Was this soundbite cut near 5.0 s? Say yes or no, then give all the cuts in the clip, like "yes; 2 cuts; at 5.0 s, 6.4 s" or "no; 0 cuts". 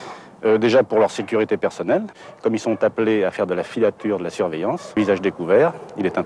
yes; 1 cut; at 5.0 s